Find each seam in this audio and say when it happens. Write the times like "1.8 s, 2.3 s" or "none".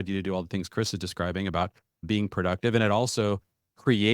2.0 s